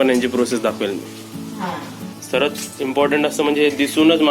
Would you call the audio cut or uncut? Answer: cut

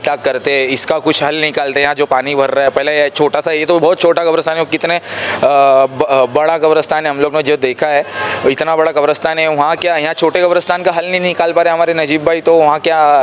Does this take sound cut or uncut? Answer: uncut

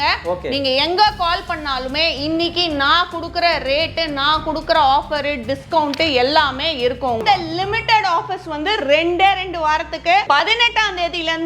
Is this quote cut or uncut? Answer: cut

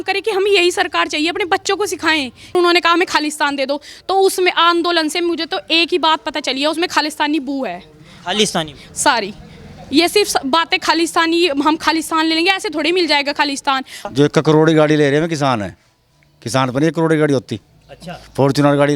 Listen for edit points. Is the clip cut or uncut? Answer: cut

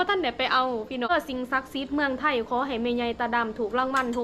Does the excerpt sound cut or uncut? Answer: cut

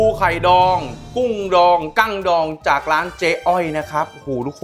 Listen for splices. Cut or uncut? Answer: uncut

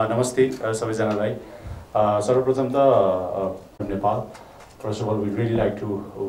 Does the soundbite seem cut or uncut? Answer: uncut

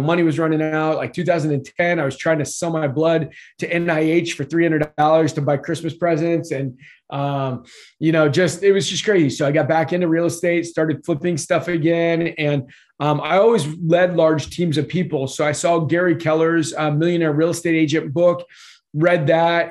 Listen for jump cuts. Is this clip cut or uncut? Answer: uncut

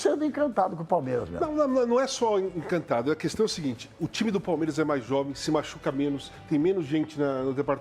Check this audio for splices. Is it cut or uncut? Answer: uncut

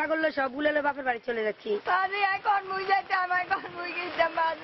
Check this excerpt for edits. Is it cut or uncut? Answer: uncut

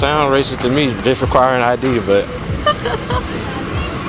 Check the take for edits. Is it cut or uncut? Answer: uncut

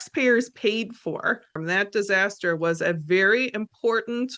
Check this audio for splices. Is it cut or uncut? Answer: cut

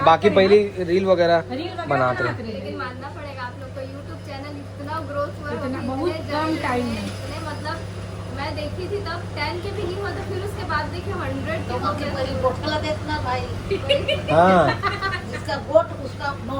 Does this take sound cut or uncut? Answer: uncut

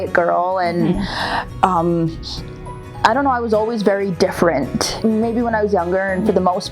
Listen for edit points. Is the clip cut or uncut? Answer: cut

